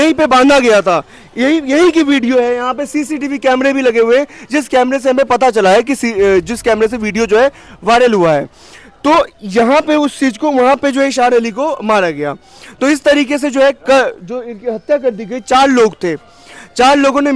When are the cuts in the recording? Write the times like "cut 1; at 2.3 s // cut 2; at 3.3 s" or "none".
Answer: none